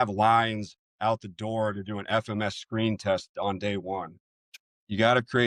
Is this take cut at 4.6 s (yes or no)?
yes